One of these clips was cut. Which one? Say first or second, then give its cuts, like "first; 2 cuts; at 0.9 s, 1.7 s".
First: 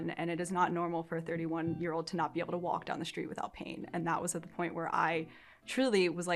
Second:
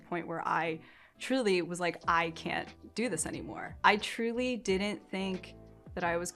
second; 1 cut; at 3.6 s